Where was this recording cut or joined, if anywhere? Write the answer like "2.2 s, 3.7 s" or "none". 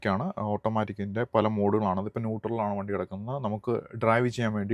none